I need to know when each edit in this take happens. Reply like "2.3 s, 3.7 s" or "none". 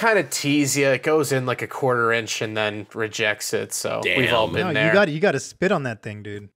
none